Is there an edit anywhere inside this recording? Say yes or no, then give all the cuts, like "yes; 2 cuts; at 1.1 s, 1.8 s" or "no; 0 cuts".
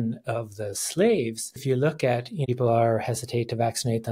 yes; 2 cuts; at 1.6 s, 2.4 s